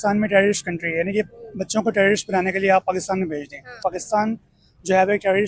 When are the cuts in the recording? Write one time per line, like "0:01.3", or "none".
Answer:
0:03.7